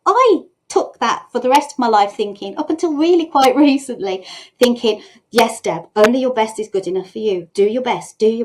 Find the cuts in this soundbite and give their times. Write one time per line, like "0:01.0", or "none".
0:07.5